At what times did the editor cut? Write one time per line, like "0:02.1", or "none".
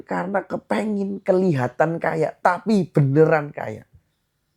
none